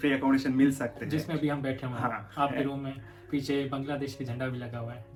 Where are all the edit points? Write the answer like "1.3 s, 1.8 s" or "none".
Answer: none